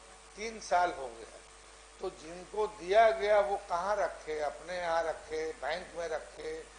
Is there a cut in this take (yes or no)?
no